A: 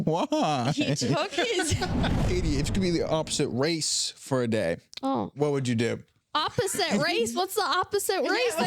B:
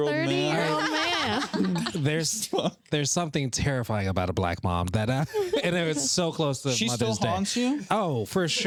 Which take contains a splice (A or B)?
A